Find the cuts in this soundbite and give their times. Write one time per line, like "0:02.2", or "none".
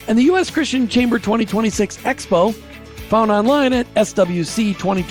none